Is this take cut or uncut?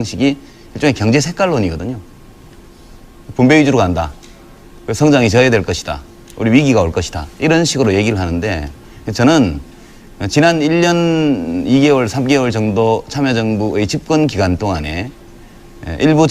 cut